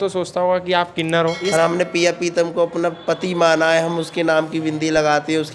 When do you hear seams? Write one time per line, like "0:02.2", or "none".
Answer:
0:01.4